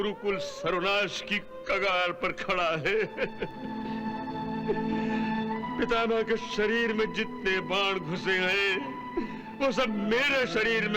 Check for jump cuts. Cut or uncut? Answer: uncut